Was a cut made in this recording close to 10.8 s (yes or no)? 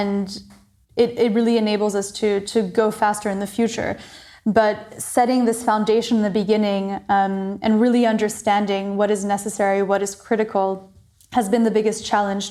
no